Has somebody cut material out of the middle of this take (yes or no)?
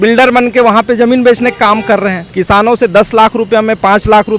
yes